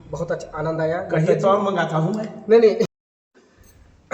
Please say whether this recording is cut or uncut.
cut